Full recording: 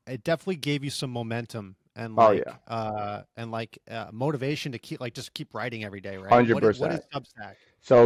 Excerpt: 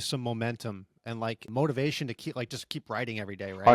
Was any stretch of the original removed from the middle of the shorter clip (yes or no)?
yes